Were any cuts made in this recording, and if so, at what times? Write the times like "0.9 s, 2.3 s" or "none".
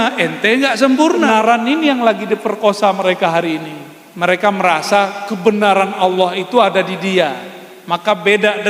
1.3 s